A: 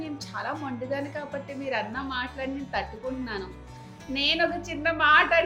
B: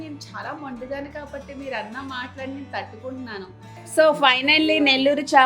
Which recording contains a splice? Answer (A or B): B